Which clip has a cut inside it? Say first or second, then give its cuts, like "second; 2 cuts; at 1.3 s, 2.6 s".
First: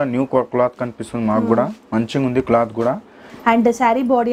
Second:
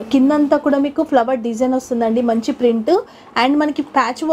first; 1 cut; at 3.3 s